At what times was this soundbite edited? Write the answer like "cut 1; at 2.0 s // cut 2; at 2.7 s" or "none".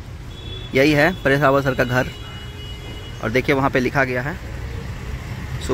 none